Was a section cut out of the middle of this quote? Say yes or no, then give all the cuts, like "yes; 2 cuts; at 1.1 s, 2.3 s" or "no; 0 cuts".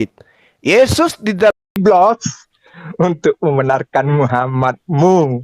yes; 1 cut; at 1.5 s